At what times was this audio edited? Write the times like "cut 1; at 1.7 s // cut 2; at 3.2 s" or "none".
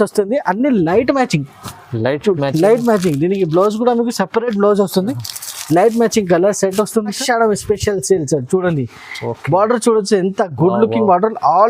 cut 1; at 7.2 s